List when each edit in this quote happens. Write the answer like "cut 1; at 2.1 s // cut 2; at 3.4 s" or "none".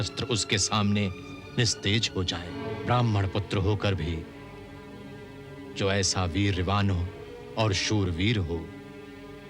cut 1; at 2.6 s